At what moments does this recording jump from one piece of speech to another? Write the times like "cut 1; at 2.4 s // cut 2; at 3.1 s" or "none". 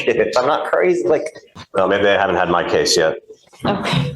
cut 1; at 1.5 s